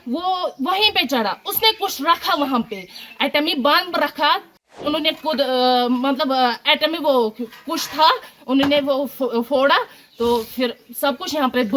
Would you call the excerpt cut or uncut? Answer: cut